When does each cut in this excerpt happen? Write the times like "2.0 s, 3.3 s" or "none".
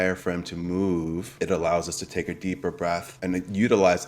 1.3 s, 3.1 s